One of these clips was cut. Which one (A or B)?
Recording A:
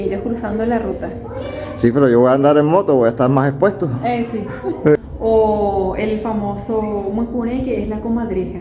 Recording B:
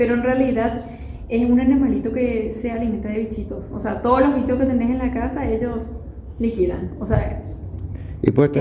A